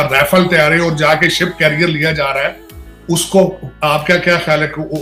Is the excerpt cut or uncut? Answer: uncut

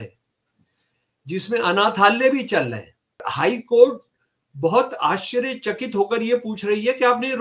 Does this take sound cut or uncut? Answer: cut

